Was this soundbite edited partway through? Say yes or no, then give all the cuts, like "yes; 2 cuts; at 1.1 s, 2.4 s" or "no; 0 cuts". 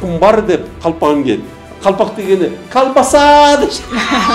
no; 0 cuts